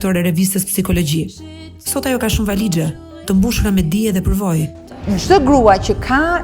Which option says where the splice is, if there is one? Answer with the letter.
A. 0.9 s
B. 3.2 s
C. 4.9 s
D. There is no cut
C